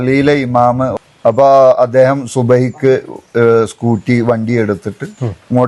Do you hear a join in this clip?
yes; 1 cut; at 0.9 s

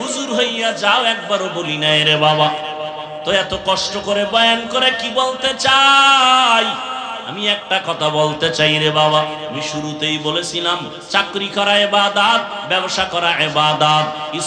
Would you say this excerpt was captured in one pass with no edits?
yes; 0 cuts

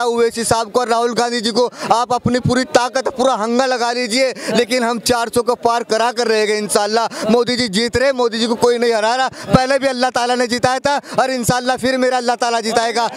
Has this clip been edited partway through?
no; 0 cuts

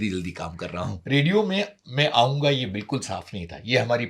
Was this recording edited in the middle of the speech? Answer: yes; 1 cut; at 1.0 s

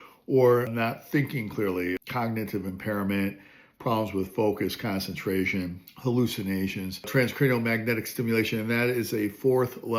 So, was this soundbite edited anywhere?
yes; 1 cut; at 7.1 s

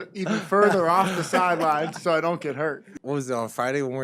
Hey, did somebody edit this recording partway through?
yes; 1 cut; at 2.9 s

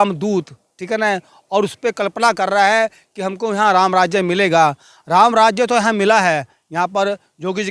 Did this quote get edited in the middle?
no; 0 cuts

